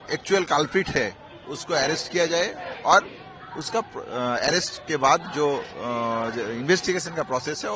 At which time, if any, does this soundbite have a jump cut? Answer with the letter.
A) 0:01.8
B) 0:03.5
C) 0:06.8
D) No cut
D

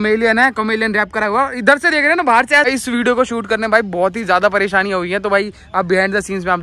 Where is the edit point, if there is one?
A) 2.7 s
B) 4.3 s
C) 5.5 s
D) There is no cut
A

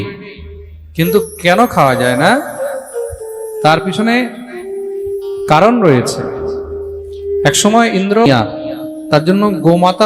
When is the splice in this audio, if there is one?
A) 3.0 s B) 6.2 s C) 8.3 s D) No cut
C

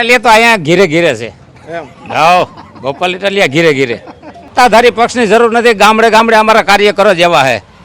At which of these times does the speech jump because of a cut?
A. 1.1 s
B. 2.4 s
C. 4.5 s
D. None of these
C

